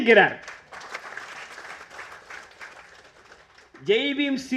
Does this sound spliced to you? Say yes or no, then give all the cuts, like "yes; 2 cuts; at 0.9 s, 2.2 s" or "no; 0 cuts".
no; 0 cuts